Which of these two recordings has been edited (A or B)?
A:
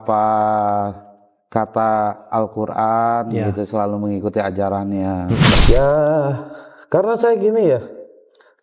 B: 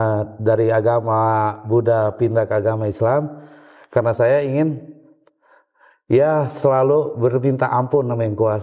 A